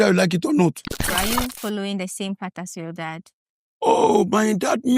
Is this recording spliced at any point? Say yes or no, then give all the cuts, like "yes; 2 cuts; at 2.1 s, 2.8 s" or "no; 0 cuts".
yes; 1 cut; at 1.0 s